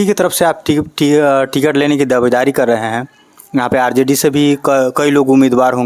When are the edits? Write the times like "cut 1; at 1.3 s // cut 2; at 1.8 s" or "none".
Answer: none